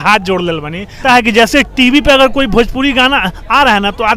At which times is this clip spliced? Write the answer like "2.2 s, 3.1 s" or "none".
1.0 s